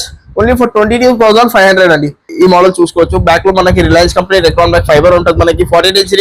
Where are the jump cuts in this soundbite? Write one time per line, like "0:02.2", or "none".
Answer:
0:02.3